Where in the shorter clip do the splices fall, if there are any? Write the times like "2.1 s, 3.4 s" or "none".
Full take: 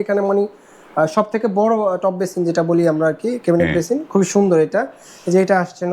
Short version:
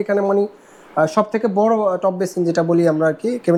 none